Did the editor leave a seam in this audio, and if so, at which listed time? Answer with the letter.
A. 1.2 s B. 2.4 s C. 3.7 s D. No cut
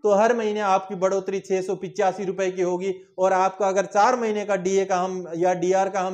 D